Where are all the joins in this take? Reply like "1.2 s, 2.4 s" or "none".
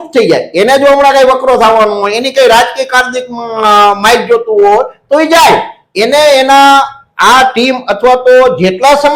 none